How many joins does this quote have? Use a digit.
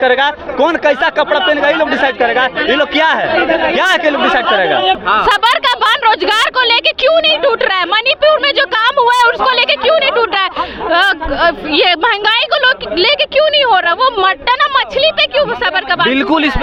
0